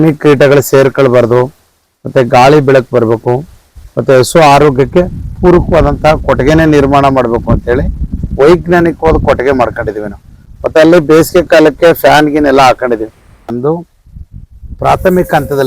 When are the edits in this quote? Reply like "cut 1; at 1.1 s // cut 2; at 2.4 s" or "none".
cut 1; at 13.5 s